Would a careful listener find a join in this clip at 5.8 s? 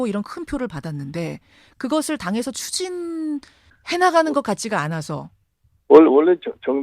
yes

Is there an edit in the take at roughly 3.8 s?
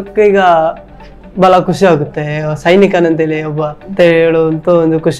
yes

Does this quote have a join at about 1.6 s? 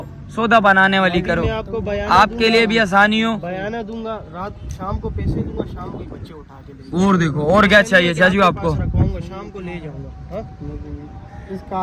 no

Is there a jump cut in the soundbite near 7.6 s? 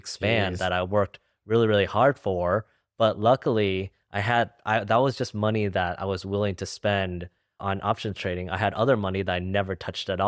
yes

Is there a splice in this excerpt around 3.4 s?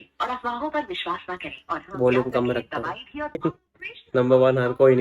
yes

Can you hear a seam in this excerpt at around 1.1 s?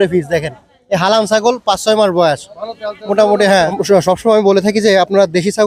no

